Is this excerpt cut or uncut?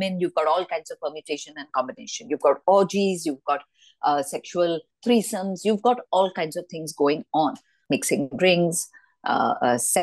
cut